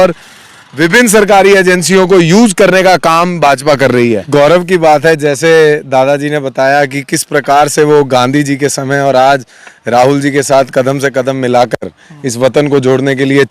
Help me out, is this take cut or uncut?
cut